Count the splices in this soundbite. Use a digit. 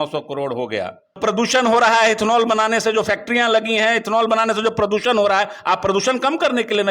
1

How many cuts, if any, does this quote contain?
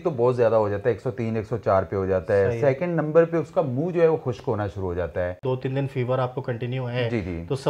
1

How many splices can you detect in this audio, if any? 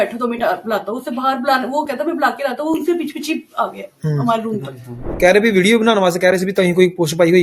1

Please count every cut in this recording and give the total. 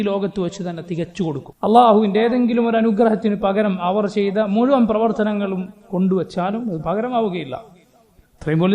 1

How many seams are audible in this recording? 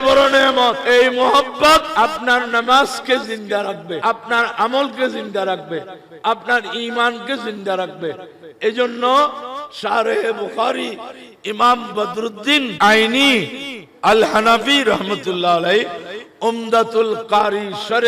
4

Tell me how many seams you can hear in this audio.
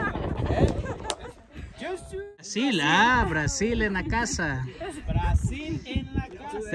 1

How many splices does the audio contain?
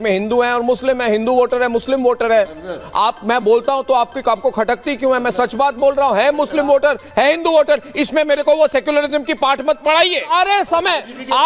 1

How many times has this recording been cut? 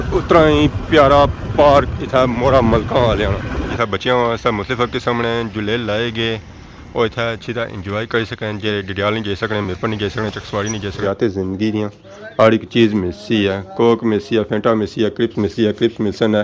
2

